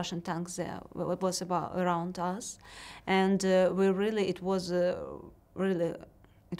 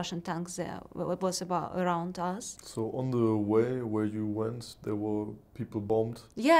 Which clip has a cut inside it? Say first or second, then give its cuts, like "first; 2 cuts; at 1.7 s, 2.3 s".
second; 2 cuts; at 2.6 s, 5.8 s